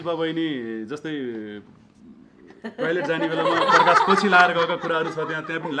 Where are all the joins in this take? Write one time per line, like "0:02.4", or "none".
none